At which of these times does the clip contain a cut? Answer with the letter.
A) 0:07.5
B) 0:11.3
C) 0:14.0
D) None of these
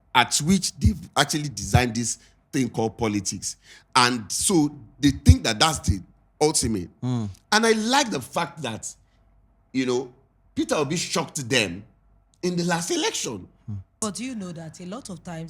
C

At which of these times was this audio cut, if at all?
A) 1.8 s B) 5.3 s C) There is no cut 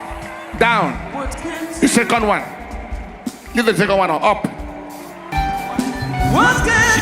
B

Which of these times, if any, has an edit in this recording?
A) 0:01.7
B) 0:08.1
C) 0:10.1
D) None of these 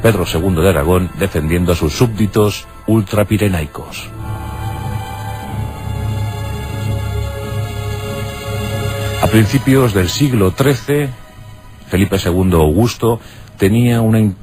C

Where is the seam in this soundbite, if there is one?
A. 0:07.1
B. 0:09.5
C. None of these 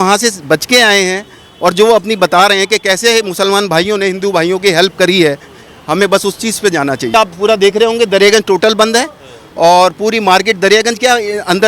A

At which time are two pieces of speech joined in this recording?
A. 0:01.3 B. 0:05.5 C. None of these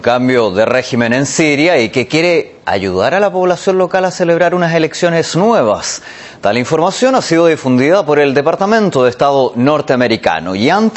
C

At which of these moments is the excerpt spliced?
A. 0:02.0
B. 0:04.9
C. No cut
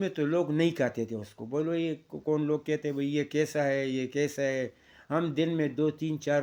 C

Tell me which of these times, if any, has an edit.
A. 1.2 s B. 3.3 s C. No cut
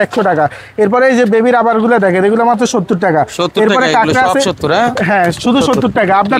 C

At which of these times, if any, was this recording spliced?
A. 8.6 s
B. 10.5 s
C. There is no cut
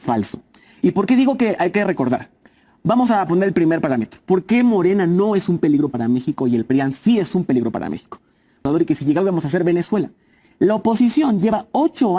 A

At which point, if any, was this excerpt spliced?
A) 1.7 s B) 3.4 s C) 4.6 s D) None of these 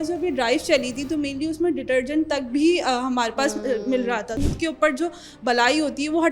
C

